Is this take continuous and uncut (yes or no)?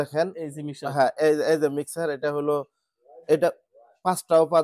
yes